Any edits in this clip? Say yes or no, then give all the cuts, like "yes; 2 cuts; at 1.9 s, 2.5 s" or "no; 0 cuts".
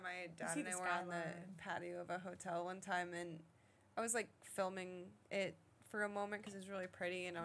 no; 0 cuts